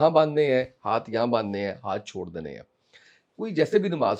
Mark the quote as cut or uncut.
uncut